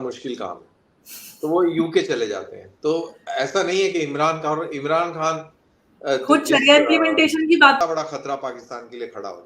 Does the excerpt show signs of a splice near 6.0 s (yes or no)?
no